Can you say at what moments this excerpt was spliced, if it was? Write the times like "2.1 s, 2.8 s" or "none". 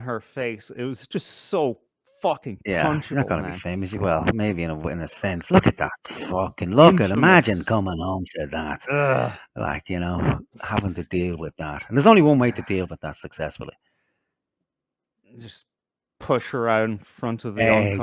none